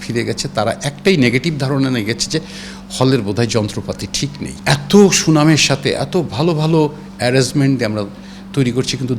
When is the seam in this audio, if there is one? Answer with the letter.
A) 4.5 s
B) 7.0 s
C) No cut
A